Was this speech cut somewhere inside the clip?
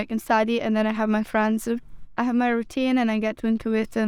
no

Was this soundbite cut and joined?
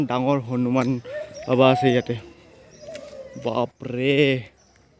no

